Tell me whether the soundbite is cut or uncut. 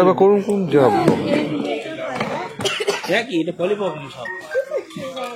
uncut